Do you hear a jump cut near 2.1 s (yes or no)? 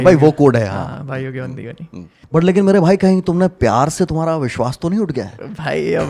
yes